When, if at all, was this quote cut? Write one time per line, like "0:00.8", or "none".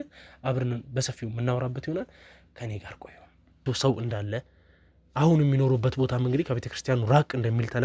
0:03.6